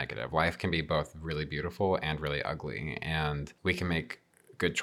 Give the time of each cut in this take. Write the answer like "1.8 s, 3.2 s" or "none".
3.5 s